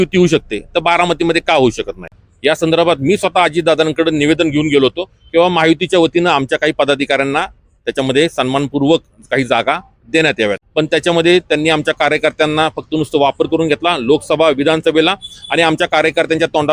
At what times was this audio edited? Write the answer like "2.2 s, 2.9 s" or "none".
2.2 s, 10.6 s

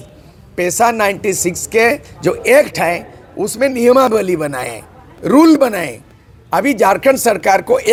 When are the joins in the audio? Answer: none

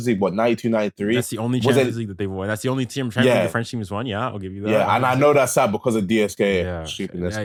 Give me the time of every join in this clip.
none

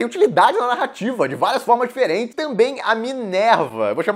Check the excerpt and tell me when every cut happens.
2.4 s

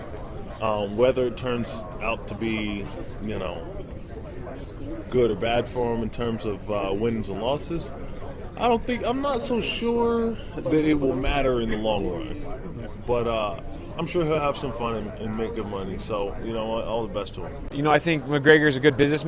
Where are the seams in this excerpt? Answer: 7.2 s

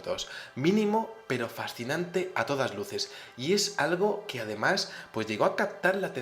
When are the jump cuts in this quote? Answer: 1.2 s

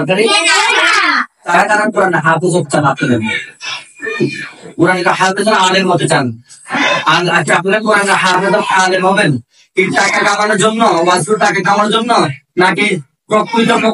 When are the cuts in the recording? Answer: 1.6 s

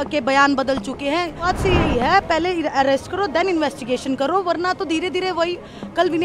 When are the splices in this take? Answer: 1.4 s

